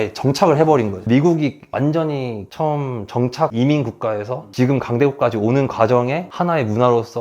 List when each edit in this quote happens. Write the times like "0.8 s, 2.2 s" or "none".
1.0 s